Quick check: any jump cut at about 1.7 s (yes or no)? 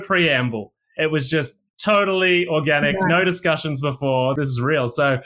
no